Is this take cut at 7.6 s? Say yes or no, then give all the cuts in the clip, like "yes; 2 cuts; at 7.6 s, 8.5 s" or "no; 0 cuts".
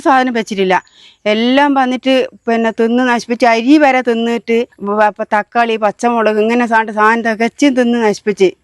no; 1 cut; at 4.8 s